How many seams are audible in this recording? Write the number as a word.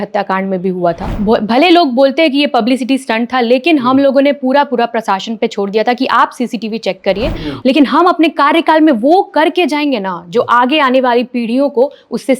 two